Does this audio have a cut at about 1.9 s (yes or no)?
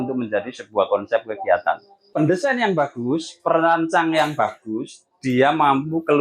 yes